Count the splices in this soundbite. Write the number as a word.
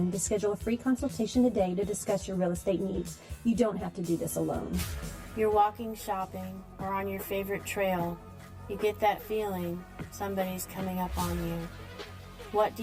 one